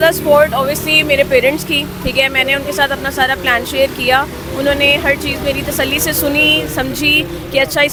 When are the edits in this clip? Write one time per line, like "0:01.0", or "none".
none